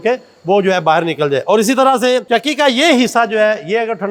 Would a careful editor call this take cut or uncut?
uncut